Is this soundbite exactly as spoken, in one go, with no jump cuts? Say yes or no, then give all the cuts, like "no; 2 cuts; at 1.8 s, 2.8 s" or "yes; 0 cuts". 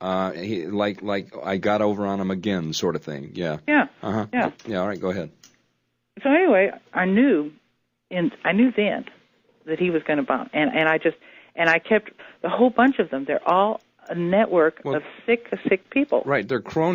yes; 0 cuts